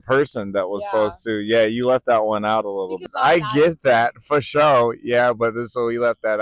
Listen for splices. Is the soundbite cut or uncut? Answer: cut